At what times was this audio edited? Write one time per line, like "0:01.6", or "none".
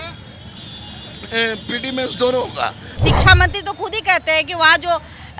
0:03.1